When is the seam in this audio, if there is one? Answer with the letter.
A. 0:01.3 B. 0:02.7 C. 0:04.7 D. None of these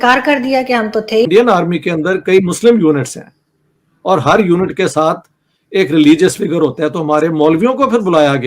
A